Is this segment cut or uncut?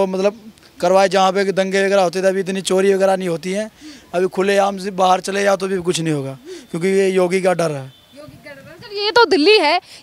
uncut